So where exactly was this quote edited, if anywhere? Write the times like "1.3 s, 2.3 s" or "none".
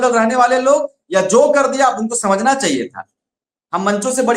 none

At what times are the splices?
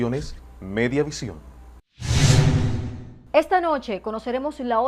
none

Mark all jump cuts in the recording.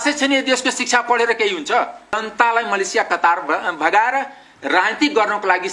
2.3 s

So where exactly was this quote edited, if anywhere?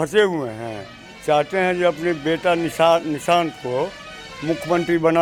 none

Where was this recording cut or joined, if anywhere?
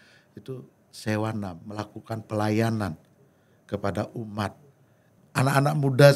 5.0 s

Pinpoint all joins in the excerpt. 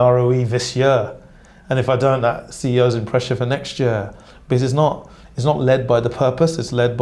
none

